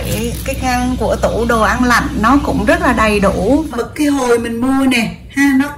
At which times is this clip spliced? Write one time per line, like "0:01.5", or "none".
0:03.7